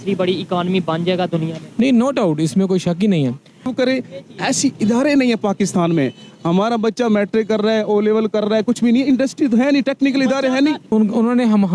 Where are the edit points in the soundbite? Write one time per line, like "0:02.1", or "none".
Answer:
0:03.7
0:10.9